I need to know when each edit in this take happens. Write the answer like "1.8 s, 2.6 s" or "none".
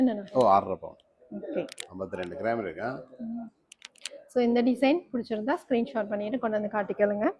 none